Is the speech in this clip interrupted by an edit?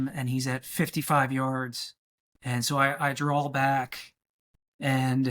no; 0 cuts

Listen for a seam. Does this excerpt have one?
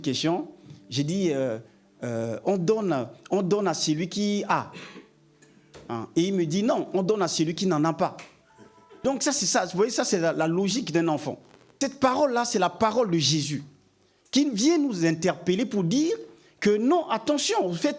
yes; 2 cuts; at 9.0 s, 11.7 s

